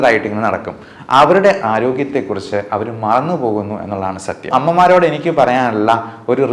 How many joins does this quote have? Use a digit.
1